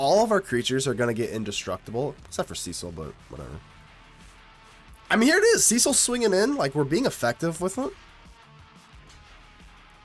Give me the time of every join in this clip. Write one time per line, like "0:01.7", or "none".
none